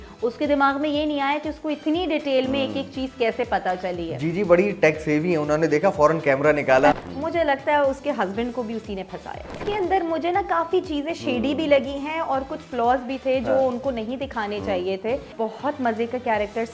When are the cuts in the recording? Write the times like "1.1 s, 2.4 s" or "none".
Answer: 7.0 s, 9.6 s, 15.3 s